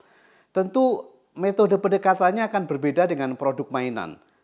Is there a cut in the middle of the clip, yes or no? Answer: no